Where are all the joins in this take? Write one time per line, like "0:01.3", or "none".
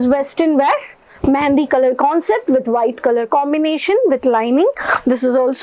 none